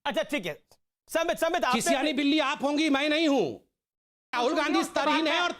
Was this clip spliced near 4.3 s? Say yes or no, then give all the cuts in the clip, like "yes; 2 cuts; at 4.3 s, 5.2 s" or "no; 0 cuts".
yes; 1 cut; at 4.3 s